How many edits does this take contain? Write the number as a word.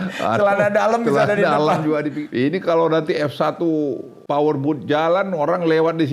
two